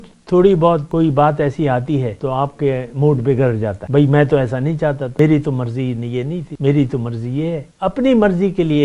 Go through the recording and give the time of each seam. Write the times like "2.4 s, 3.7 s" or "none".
0.9 s, 2.1 s, 3.8 s, 5.1 s, 6.4 s, 7.7 s